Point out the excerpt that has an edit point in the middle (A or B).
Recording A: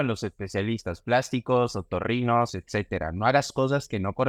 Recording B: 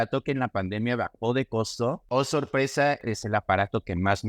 B